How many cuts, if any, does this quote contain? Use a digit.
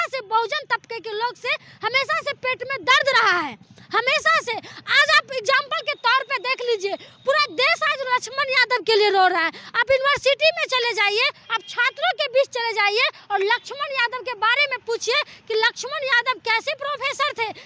0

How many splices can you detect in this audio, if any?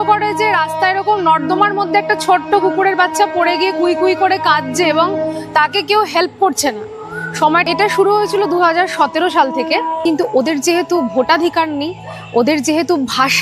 2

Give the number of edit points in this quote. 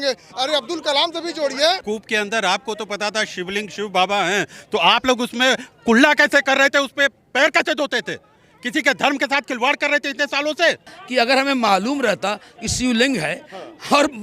2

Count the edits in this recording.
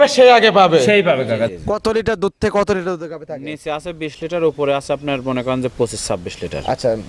1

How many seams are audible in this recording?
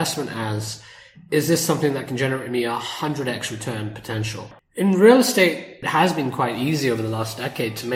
2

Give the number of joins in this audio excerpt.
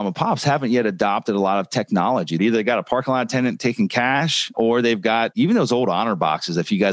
1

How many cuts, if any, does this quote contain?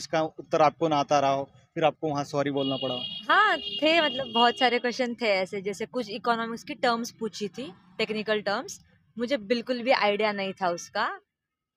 0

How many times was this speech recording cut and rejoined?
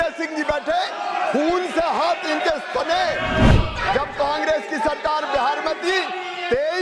1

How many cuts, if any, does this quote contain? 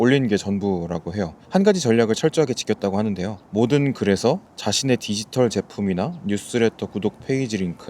3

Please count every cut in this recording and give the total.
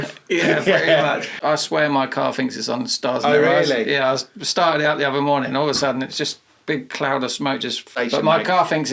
2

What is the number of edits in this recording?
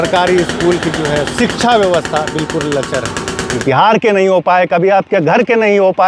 1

